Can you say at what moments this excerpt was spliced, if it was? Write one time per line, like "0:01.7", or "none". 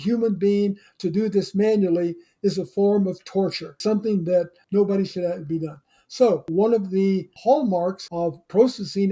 0:06.5
0:08.0